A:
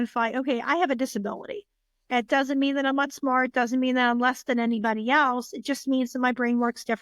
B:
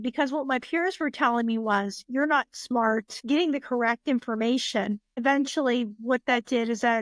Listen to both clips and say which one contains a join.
B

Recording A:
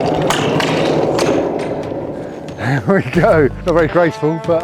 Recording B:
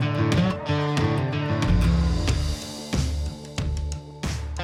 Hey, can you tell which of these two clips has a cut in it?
A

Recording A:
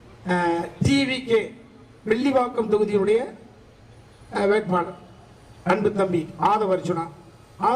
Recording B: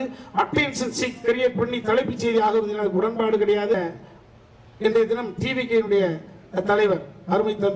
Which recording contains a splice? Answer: B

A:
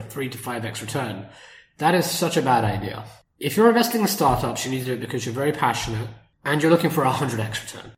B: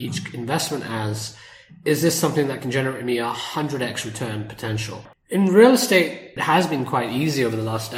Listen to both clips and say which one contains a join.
B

